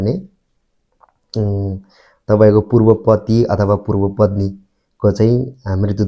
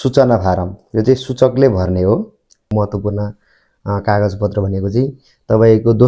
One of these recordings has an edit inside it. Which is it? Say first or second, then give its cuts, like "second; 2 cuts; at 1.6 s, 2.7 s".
second; 1 cut; at 2.7 s